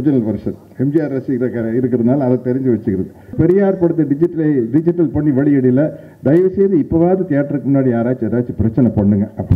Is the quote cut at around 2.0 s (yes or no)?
no